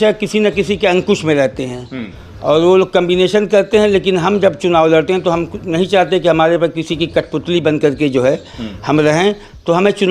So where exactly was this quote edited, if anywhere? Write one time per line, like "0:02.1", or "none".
none